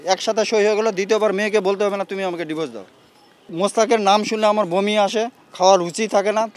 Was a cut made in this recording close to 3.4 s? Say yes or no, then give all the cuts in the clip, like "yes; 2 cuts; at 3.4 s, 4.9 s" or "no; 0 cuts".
yes; 1 cut; at 3.4 s